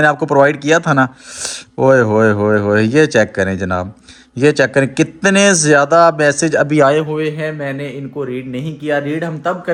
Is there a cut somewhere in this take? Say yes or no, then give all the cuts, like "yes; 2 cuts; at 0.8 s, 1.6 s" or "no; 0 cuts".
no; 0 cuts